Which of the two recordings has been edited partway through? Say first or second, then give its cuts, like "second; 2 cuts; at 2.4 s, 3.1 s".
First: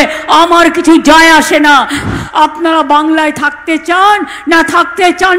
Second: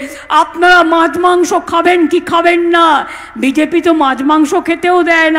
first; 1 cut; at 2.1 s